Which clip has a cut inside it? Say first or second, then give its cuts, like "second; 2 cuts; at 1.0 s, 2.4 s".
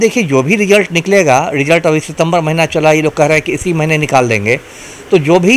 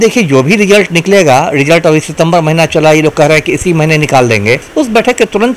second; 1 cut; at 4.7 s